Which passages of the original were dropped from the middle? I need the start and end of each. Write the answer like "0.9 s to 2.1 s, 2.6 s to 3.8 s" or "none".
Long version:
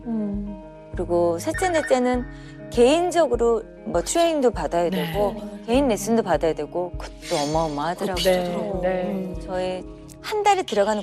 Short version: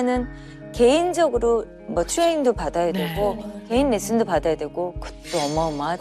none